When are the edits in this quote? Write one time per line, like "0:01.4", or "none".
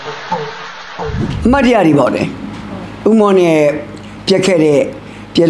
none